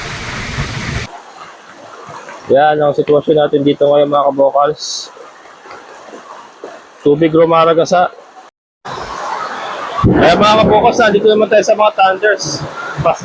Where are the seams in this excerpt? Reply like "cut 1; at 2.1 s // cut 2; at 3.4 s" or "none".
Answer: cut 1; at 1.1 s // cut 2; at 8.9 s